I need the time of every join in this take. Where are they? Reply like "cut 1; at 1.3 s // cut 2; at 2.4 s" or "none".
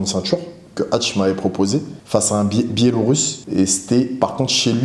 cut 1; at 2.0 s // cut 2; at 3.4 s